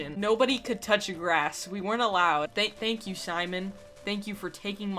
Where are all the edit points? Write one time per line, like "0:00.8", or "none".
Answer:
0:02.5